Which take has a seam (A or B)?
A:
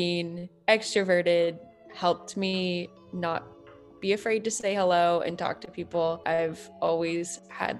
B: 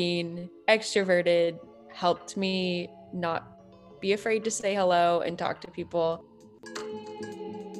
A